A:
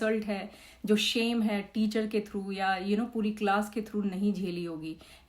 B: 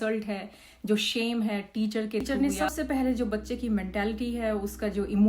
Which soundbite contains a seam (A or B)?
B